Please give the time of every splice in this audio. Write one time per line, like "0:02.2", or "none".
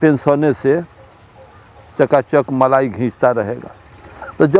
none